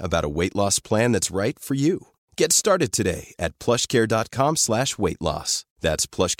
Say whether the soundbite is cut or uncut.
uncut